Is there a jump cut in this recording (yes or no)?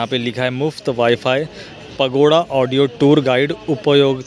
no